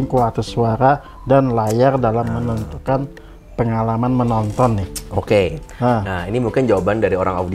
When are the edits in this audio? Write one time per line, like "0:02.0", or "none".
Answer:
none

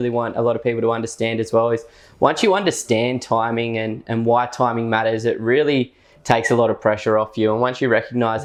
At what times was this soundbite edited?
none

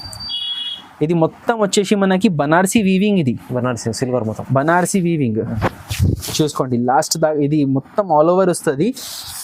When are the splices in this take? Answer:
none

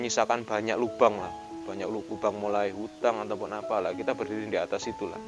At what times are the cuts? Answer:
none

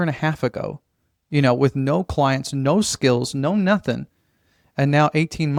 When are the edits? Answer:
none

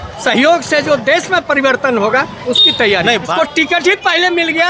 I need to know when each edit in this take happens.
0:03.3

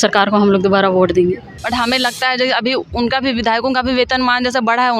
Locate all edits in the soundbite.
0:01.5

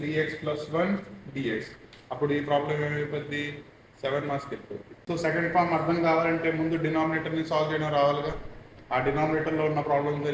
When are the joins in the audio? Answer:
0:04.9

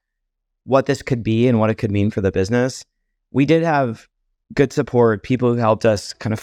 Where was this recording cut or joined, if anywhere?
none

